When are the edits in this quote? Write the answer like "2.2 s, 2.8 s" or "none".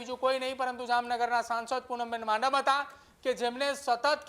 none